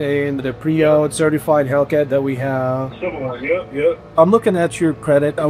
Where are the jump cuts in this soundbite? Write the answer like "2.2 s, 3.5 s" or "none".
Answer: none